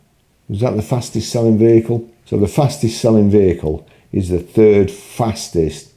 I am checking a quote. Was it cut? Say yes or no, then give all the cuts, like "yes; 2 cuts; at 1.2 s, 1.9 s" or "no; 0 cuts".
yes; 1 cut; at 2.1 s